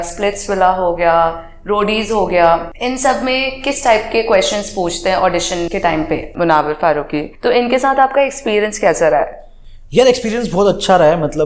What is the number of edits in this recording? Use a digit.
3